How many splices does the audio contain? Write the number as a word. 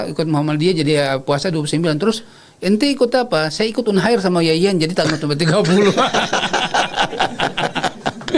zero